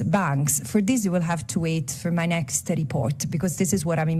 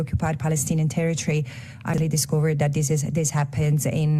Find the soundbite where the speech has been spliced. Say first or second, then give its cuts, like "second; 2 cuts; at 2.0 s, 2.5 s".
second; 1 cut; at 2.0 s